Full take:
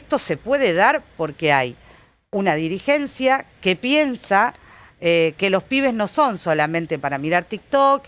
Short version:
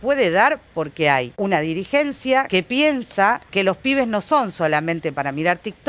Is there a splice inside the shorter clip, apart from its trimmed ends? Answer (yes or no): yes